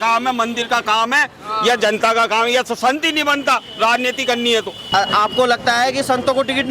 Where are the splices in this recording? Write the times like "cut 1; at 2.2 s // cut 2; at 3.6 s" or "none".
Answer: cut 1; at 4.8 s